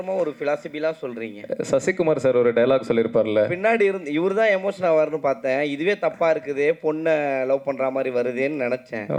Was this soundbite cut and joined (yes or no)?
no